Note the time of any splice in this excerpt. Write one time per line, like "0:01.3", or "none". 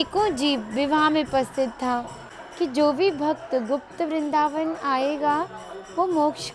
0:02.2